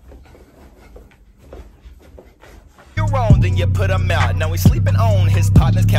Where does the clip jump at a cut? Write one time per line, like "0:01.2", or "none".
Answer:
0:02.8